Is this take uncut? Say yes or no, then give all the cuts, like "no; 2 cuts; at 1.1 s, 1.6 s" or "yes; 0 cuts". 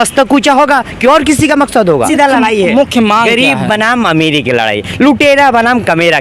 no; 1 cut; at 2.1 s